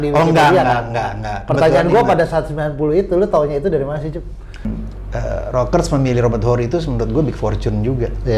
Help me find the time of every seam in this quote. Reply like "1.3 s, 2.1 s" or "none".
4.7 s

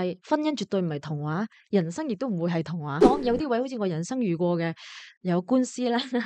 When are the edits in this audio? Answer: 3.0 s

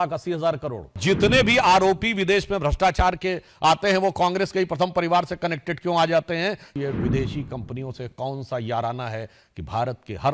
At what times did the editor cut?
1.0 s, 6.7 s

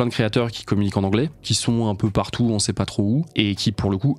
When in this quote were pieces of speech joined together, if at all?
1.5 s, 3.3 s

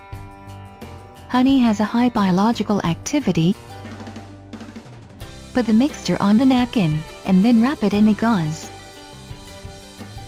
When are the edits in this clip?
none

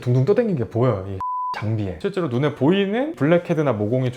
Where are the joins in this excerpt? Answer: 1.3 s

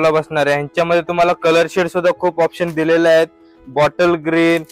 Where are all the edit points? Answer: none

